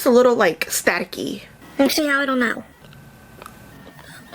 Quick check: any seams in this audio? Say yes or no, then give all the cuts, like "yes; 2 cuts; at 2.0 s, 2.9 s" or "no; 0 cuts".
yes; 1 cut; at 2.8 s